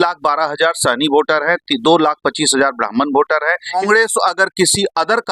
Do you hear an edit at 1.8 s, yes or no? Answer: no